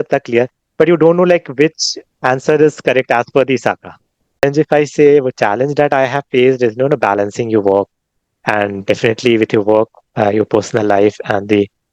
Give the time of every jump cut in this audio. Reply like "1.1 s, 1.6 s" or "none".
4.4 s